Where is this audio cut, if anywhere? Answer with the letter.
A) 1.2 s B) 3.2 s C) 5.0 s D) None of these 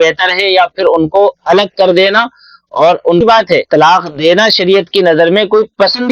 B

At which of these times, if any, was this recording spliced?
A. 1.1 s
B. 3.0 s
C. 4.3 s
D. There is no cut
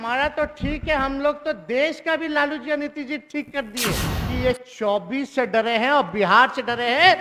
C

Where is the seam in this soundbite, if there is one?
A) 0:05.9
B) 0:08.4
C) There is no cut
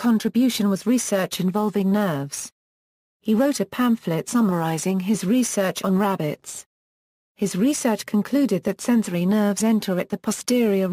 B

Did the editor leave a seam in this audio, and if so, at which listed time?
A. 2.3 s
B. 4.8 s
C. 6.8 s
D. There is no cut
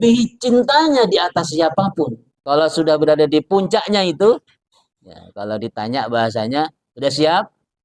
A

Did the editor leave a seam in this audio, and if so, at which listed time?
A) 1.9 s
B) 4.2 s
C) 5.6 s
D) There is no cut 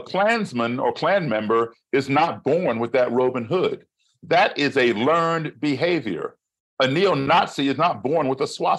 D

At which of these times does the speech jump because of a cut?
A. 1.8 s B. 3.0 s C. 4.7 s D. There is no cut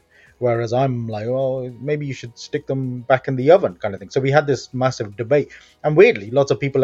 D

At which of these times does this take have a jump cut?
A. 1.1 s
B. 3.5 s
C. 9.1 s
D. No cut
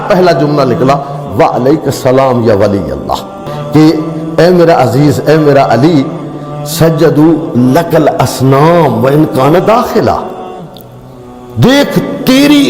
B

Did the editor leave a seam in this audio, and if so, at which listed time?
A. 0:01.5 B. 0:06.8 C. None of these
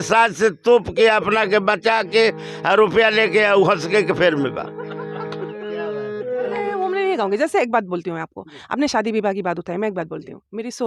B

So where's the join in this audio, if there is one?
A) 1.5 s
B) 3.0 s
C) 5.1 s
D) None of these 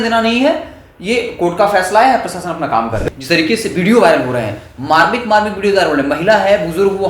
B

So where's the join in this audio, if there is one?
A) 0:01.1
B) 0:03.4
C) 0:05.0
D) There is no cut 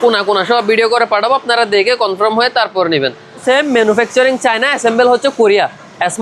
B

